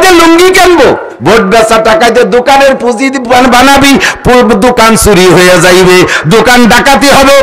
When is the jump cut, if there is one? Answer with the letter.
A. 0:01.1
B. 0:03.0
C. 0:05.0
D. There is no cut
A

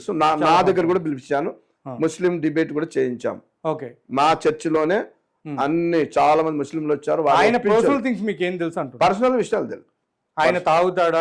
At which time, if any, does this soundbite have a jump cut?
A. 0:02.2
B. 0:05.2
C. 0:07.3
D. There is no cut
D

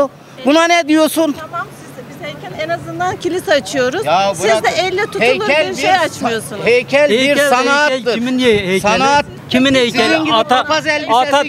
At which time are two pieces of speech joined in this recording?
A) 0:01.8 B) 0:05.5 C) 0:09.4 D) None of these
C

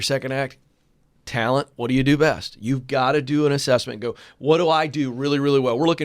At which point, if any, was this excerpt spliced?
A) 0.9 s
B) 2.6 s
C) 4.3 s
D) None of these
D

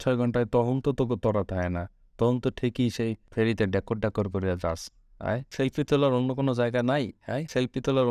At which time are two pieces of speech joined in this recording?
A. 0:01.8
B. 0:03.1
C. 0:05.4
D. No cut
C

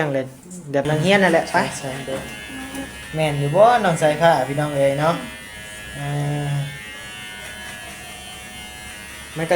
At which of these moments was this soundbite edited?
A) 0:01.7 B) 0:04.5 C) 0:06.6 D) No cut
A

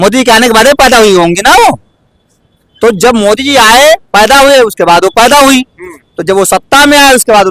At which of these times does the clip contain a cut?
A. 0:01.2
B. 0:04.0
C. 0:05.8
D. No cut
D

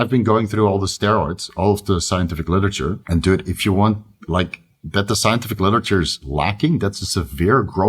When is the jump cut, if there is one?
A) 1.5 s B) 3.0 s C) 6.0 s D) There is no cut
B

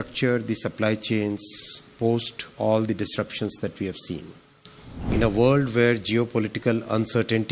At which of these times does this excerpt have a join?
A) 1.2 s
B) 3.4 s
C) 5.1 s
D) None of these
C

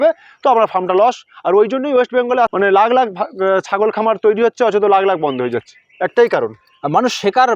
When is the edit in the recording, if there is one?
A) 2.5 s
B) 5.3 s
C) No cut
A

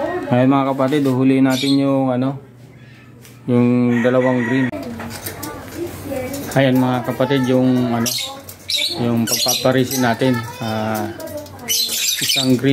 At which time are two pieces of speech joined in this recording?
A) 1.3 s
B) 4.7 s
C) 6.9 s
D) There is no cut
B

